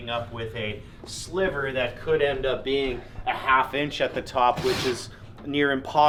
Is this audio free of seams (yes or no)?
yes